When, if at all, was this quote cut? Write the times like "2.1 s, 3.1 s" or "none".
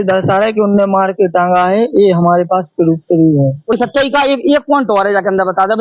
3.7 s